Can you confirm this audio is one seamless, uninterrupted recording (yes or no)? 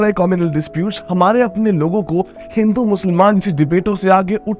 yes